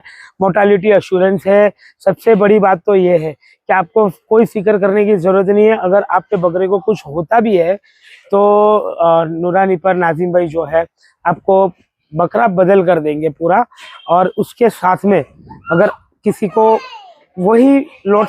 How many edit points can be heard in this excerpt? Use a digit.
0